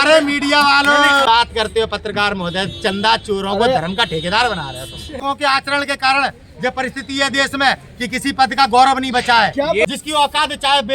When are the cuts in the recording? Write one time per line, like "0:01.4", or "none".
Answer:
0:01.3
0:05.2
0:09.9